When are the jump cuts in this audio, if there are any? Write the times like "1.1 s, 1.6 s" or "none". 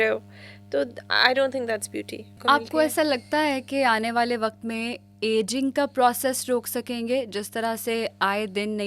2.4 s